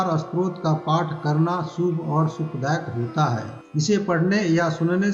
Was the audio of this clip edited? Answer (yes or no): yes